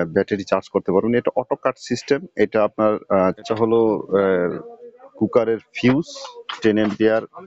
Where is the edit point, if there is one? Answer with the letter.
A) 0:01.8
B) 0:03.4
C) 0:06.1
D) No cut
B